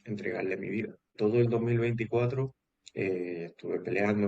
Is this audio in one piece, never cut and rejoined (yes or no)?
no